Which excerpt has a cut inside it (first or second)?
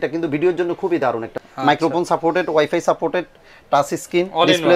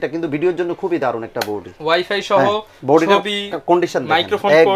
first